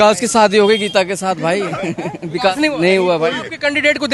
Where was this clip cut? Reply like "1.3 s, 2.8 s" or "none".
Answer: none